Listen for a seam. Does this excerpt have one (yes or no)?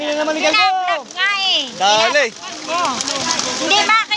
no